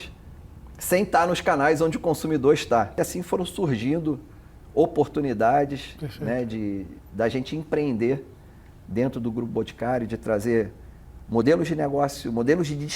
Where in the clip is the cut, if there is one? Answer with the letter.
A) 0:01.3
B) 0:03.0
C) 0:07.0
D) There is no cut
B